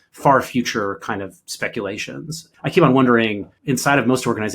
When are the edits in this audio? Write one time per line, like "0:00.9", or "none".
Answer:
0:02.4
0:03.5